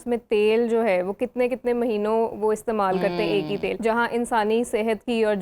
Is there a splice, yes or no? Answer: yes